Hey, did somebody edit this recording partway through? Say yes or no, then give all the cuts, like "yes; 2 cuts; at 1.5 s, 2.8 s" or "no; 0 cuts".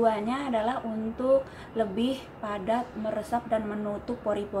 no; 0 cuts